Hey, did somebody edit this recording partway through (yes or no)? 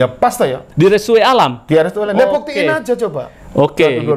no